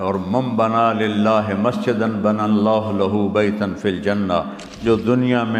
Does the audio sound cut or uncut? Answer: uncut